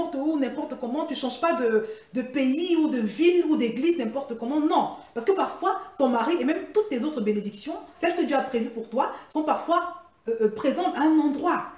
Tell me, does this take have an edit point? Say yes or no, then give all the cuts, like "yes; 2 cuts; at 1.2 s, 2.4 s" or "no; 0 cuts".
yes; 1 cut; at 7.9 s